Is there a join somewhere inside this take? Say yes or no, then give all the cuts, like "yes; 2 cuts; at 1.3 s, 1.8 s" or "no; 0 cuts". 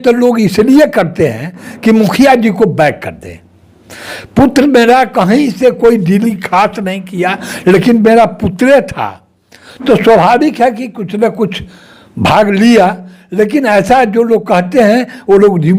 no; 0 cuts